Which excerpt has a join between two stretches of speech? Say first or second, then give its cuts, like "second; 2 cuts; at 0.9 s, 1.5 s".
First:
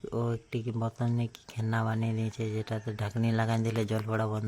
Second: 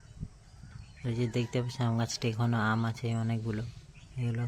second; 1 cut; at 0.9 s